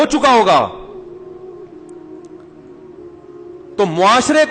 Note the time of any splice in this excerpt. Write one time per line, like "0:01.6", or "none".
none